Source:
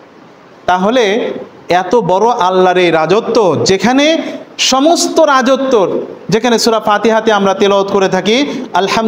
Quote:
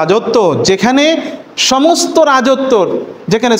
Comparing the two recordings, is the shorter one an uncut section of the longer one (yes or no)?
yes